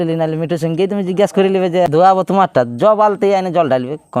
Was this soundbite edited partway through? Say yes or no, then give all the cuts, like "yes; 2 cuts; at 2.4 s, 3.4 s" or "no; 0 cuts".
yes; 1 cut; at 1.9 s